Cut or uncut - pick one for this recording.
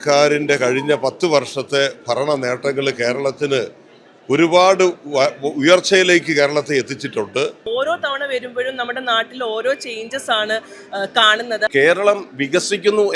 cut